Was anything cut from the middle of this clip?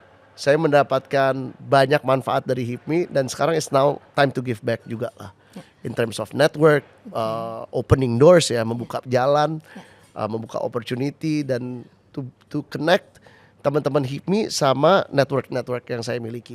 no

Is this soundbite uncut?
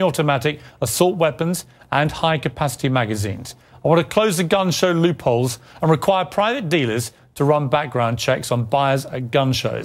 yes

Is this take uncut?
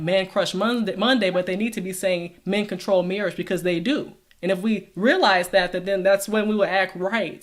yes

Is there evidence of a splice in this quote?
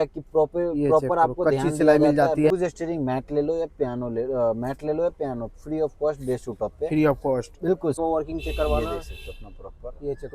yes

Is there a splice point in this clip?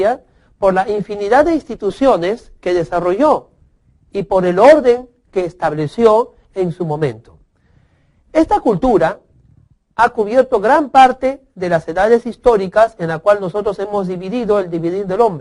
yes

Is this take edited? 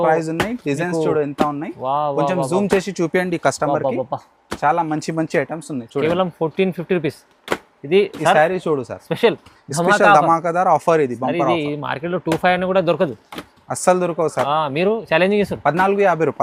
no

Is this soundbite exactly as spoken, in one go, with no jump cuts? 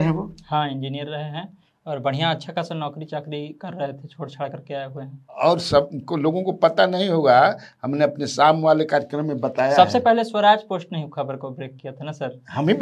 yes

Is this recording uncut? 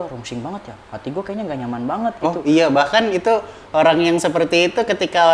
yes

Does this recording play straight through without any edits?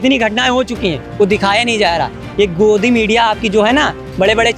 yes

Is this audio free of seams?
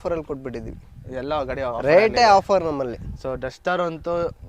yes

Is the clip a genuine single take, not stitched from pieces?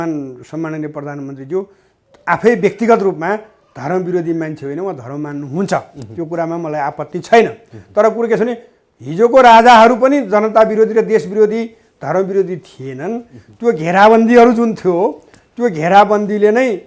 yes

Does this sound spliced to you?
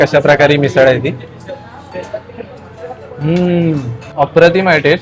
yes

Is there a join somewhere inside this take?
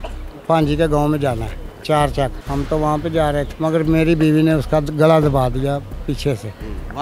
yes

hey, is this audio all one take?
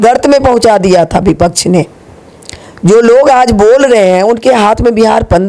yes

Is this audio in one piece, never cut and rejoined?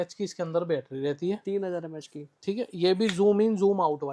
yes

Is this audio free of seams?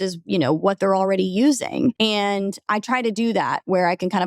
no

